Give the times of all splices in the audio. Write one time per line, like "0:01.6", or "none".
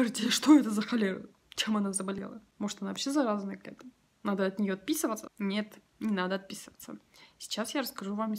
0:02.2
0:05.3